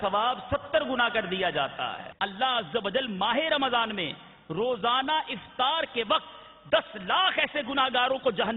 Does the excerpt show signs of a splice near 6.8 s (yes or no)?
no